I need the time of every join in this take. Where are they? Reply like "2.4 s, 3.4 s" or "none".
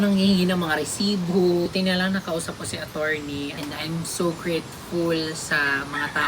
1.7 s, 3.6 s